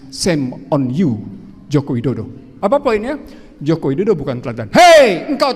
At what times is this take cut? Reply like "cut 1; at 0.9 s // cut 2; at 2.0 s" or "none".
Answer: cut 1; at 2.5 s